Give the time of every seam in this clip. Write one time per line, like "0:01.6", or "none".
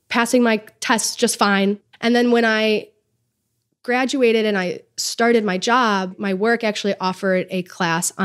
0:01.8
0:06.1